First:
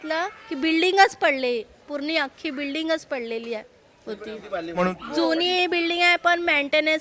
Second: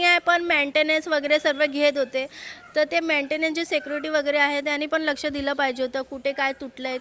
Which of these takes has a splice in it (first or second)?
first